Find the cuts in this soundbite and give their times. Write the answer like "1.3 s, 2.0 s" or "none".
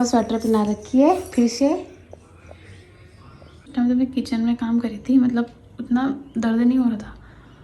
3.7 s